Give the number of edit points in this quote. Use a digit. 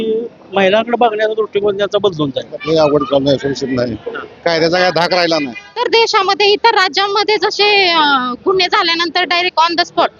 2